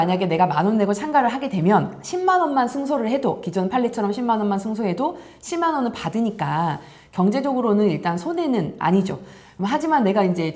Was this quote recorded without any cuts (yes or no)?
yes